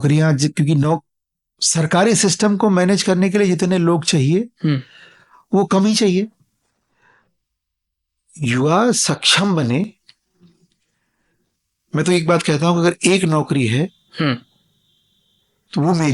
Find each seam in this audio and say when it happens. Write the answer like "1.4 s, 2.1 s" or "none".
none

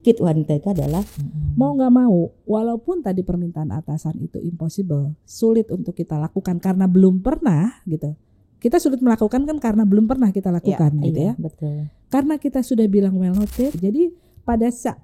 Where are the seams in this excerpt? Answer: 1.3 s, 13.8 s

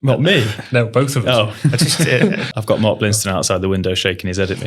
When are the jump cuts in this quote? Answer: none

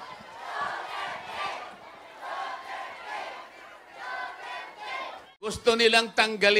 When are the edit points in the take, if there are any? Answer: 5.6 s

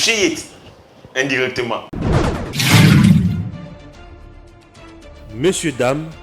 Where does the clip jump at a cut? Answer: 1.9 s

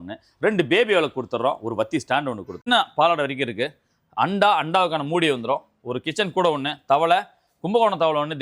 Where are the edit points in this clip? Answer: 2.7 s

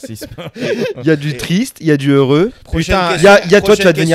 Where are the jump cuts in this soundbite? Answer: none

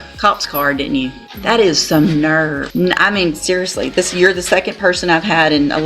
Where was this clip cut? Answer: 1.3 s, 2.6 s

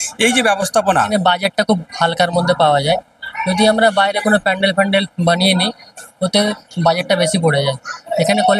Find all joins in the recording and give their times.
1.0 s

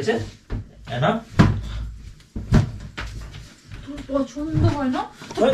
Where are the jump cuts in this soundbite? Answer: none

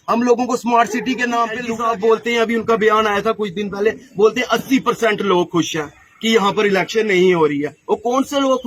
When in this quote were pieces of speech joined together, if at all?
1.7 s

